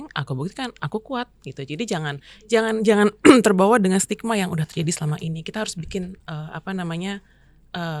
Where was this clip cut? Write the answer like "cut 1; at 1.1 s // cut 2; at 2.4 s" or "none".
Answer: none